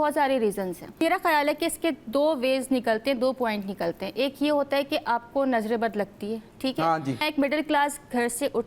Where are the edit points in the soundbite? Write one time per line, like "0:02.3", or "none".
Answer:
0:01.0
0:07.3